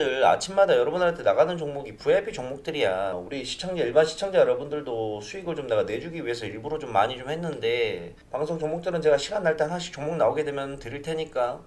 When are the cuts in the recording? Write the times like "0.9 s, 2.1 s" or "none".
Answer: 3.2 s